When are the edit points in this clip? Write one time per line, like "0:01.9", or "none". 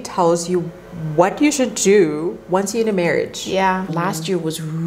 0:03.9